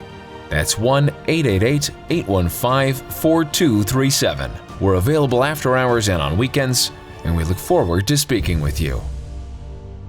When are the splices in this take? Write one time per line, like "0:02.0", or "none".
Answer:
0:09.0